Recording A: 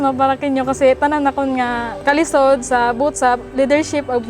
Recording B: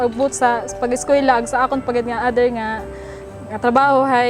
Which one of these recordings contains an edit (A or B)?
A